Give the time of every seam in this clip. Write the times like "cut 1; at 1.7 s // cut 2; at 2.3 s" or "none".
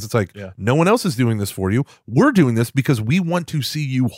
none